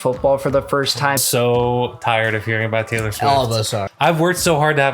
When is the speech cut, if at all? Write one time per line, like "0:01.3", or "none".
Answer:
0:01.2
0:03.9